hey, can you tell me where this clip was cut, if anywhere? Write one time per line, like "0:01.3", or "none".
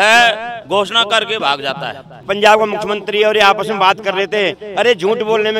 0:02.2

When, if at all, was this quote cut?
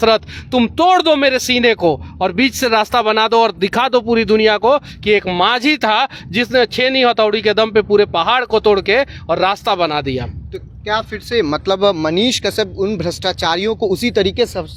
none

